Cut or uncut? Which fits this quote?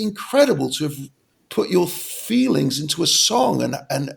uncut